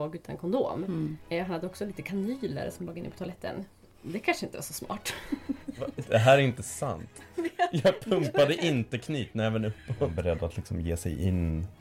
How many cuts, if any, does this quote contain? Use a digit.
2